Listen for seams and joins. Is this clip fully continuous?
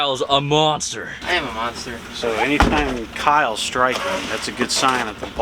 no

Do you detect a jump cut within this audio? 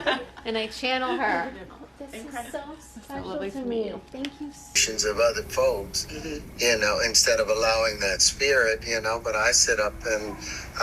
yes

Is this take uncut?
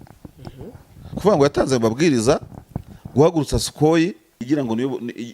no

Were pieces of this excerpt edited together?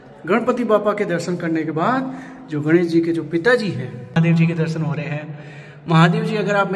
yes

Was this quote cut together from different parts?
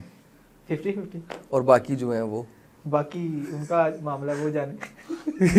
no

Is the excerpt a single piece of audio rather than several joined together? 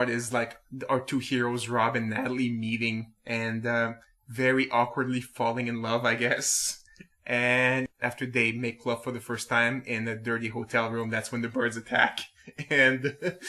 no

